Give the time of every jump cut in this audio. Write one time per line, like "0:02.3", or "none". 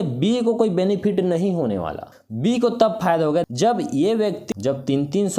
0:02.1
0:03.5
0:04.5